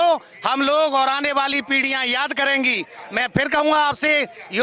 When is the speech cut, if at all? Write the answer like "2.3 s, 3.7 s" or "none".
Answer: none